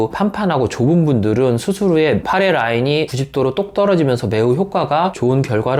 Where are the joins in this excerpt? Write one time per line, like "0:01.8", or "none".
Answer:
none